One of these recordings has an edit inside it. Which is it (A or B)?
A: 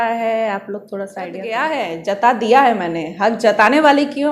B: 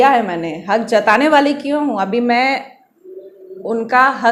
A